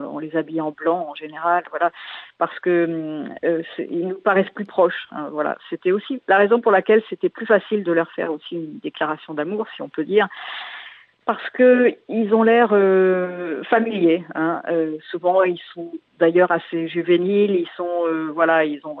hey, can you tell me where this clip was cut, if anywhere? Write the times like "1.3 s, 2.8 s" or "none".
none